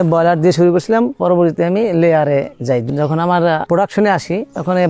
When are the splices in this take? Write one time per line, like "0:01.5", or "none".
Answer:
0:01.2
0:02.8